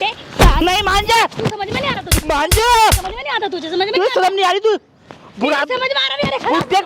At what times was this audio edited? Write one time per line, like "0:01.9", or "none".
none